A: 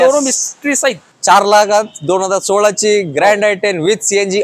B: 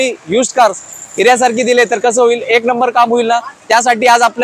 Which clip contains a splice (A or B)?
A